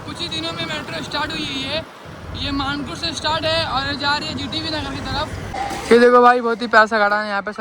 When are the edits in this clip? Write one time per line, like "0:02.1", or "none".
0:05.4